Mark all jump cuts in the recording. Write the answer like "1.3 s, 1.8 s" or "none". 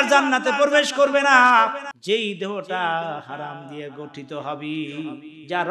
1.9 s